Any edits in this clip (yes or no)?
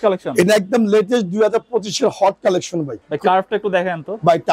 yes